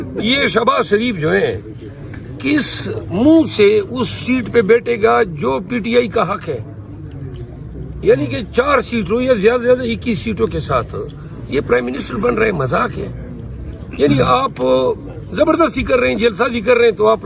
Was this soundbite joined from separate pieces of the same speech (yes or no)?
no